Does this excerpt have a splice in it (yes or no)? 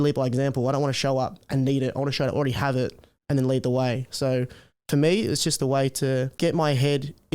yes